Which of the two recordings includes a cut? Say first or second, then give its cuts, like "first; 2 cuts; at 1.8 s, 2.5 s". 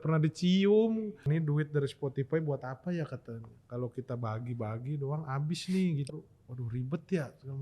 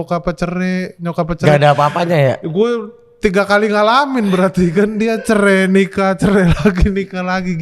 first; 2 cuts; at 1.2 s, 6.1 s